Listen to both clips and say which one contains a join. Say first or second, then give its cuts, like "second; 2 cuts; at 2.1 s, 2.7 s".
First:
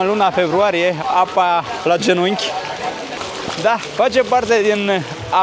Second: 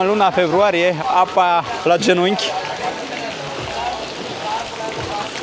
first; 1 cut; at 3.2 s